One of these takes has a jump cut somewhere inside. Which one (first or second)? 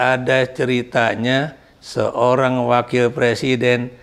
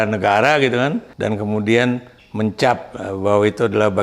second